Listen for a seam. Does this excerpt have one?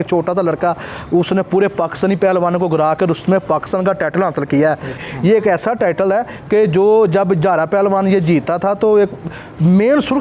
yes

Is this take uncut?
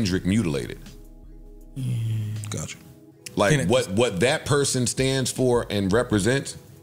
yes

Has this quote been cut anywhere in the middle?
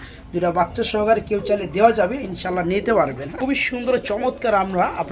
yes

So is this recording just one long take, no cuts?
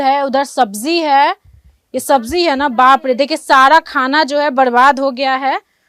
yes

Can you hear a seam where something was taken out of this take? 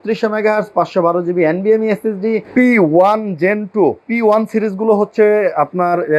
yes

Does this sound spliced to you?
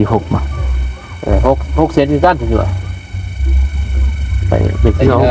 no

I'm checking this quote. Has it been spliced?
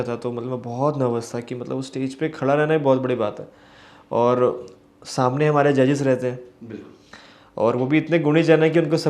no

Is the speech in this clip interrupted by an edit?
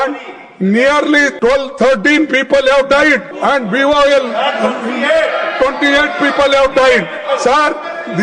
yes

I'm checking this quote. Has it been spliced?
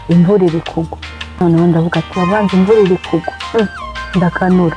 no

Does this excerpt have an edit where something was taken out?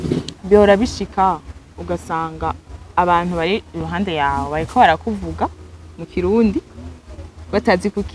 no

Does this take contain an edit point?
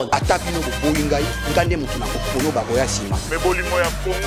no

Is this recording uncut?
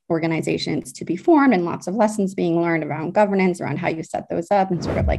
yes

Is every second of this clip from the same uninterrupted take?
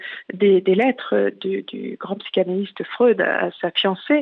yes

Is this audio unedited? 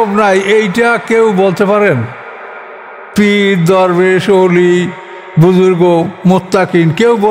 yes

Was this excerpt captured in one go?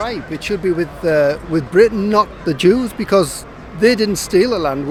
yes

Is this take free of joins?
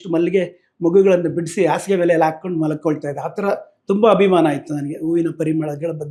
yes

